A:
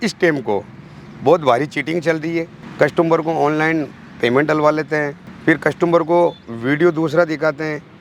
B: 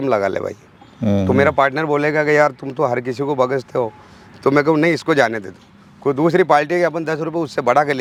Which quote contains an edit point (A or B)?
A